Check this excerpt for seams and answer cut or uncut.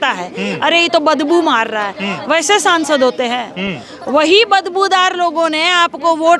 uncut